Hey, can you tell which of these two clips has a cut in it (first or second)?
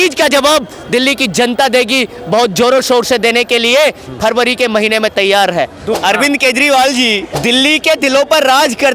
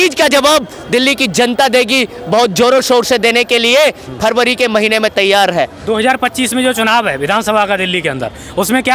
first